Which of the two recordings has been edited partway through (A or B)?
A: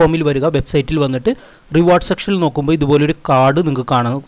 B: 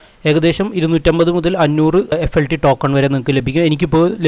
B